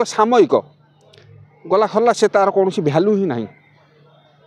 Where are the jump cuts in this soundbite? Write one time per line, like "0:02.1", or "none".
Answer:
none